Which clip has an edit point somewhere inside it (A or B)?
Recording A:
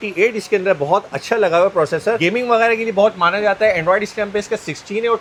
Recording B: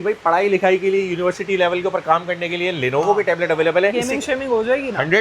B